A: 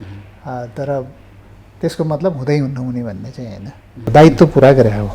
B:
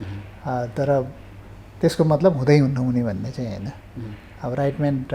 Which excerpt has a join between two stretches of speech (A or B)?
A